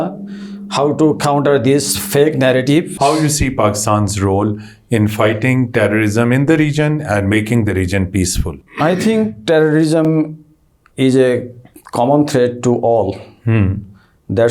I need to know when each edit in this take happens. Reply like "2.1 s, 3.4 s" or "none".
2.9 s, 8.6 s